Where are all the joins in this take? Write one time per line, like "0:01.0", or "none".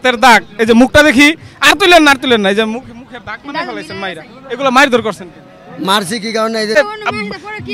0:06.8